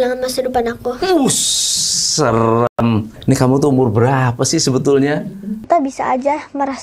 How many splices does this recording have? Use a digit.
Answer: 1